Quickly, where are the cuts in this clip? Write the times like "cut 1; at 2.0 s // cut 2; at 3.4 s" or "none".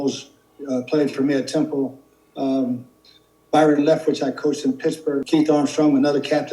cut 1; at 5.2 s